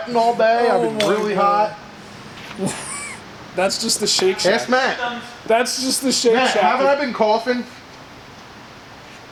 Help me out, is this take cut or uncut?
uncut